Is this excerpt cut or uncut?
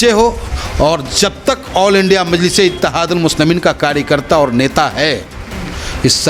uncut